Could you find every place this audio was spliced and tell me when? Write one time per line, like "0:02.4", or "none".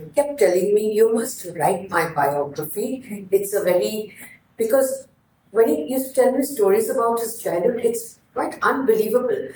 none